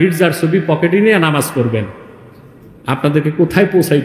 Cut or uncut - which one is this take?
uncut